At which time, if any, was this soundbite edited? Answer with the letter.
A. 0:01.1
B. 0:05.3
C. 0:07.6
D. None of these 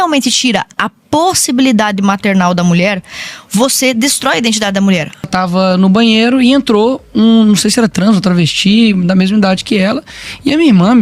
B